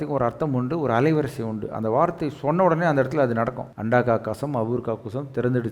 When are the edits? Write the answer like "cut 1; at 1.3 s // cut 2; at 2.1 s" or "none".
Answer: cut 1; at 3.7 s